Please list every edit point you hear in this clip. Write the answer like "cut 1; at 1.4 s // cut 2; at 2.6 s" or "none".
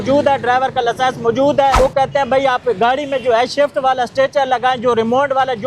cut 1; at 1.8 s